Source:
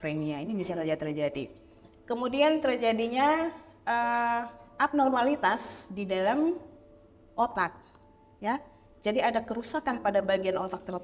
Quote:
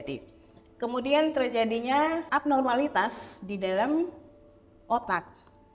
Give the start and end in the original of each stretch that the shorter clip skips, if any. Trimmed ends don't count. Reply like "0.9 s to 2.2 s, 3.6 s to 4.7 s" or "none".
3.5 s to 4.7 s